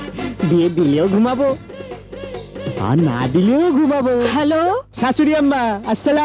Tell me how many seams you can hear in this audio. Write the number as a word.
one